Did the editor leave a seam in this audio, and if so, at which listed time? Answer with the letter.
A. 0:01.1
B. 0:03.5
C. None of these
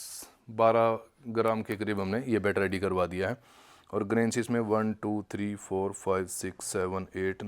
C